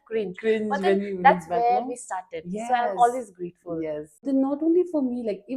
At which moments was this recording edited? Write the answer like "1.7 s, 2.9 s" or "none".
4.1 s